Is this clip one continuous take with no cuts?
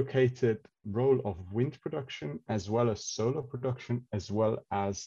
yes; 0 cuts

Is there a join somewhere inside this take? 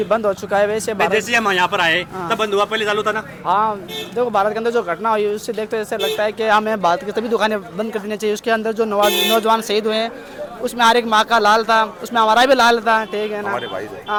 no; 0 cuts

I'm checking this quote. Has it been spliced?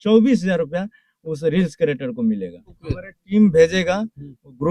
yes; 1 cut; at 2.7 s

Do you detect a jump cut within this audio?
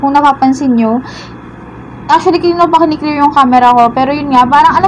no; 0 cuts

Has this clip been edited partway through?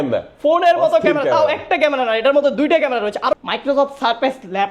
yes; 1 cut; at 3.3 s

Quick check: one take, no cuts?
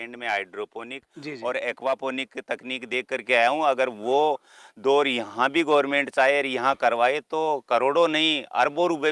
yes; 0 cuts

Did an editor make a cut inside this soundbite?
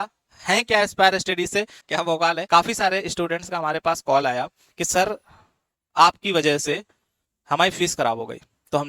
yes; 1 cut; at 1.8 s

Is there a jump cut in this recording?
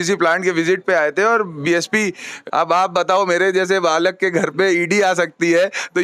yes; 1 cut; at 2.4 s

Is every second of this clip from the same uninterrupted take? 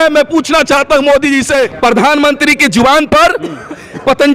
no; 1 cut; at 1.7 s

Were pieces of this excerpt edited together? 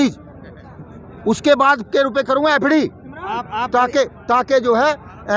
no; 0 cuts

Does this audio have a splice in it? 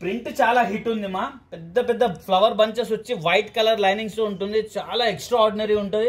no; 0 cuts

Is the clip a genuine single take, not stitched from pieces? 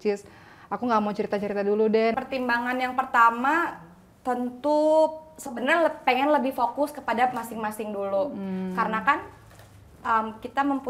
no; 1 cut; at 2.1 s

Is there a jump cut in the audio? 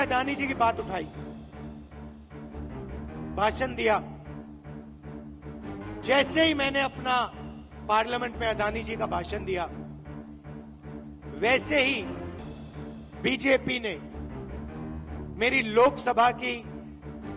yes; 4 cuts; at 1.1 s, 2.9 s, 14.0 s, 15.3 s

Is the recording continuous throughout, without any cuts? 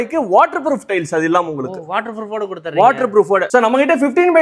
yes; 0 cuts

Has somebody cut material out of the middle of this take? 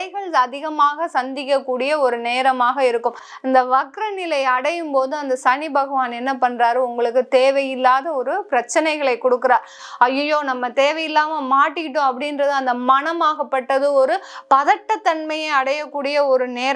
yes; 2 cuts; at 3.3 s, 9.8 s

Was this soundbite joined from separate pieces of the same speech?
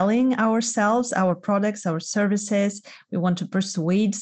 no; 0 cuts

